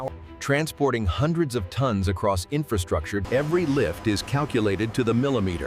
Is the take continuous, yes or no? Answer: no